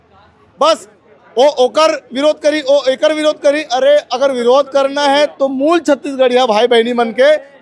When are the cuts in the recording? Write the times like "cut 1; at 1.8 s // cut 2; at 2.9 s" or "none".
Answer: none